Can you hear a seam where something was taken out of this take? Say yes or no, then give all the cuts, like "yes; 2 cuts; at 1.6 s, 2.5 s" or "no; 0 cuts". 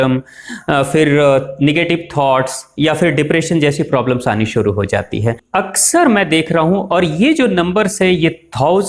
yes; 1 cut; at 5.4 s